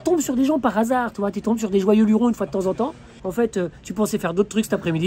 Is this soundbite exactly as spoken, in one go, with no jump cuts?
no; 1 cut; at 3.2 s

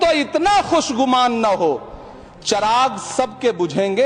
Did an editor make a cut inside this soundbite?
no; 0 cuts

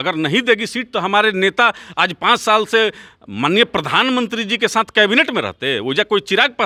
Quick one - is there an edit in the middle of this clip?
no; 0 cuts

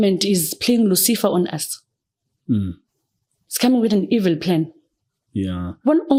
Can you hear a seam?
no; 0 cuts

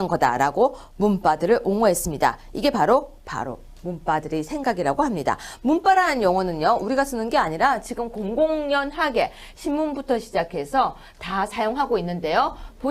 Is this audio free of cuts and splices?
no; 1 cut; at 8.6 s

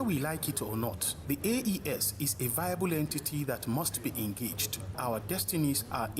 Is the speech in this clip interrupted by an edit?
yes; 2 cuts; at 1.1 s, 5.0 s

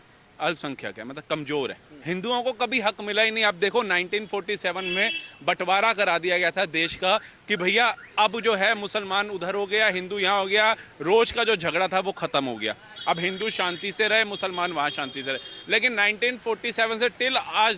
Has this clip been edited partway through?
yes; 1 cut; at 1.9 s

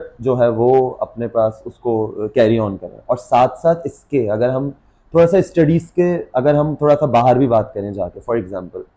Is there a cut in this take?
no; 0 cuts

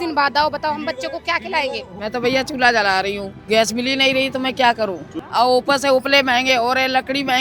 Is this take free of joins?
no; 2 cuts; at 1.9 s, 5.1 s

